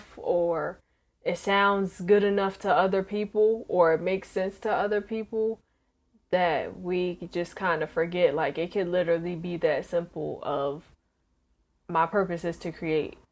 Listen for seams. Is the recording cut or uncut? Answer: uncut